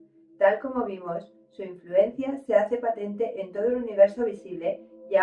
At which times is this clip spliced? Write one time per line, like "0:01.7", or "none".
0:02.4